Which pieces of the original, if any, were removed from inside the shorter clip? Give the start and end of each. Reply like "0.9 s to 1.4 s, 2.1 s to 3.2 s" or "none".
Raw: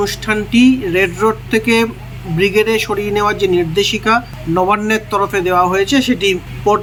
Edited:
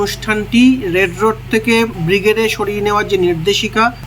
2.0 s to 2.3 s